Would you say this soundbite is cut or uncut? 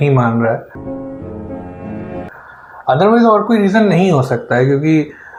uncut